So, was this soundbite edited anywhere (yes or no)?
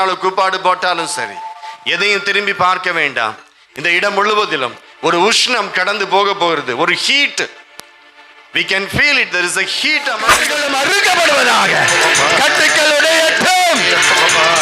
yes